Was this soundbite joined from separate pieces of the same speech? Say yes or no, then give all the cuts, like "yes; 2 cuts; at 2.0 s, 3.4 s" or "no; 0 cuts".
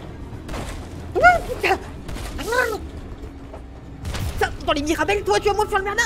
no; 0 cuts